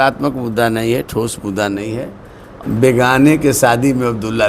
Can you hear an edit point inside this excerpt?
yes; 1 cut; at 2.4 s

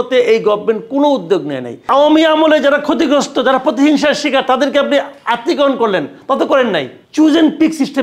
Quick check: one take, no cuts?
no; 2 cuts; at 1.9 s, 7.0 s

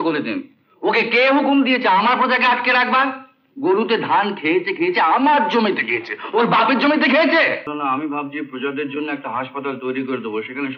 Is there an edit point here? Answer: yes; 1 cut; at 7.7 s

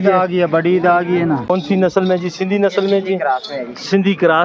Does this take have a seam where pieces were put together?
yes; 1 cut; at 1.5 s

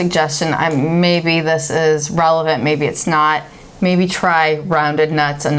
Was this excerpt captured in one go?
yes; 0 cuts

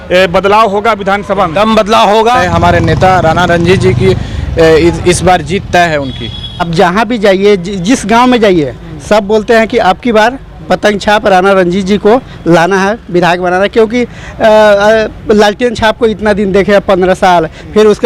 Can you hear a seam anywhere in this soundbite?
yes; 2 cuts; at 2.4 s, 6.7 s

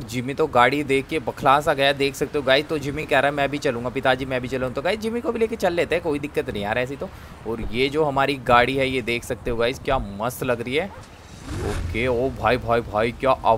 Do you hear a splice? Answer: no; 0 cuts

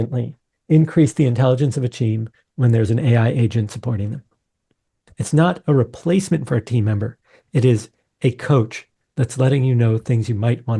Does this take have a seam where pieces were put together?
no; 0 cuts

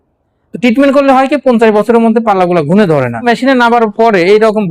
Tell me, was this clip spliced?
yes; 1 cut; at 3.2 s

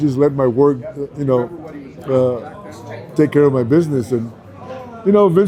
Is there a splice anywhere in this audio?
no; 0 cuts

